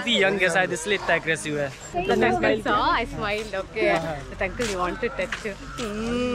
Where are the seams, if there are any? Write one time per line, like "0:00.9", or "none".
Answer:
0:02.0